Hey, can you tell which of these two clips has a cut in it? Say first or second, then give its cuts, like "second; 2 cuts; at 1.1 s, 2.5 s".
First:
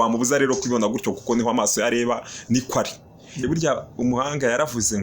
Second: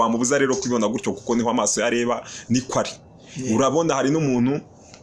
first; 1 cut; at 3.4 s